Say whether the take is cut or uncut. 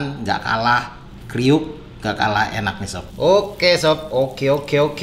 cut